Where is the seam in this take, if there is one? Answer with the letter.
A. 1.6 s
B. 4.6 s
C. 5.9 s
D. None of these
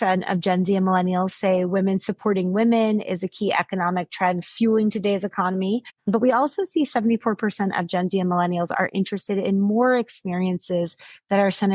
C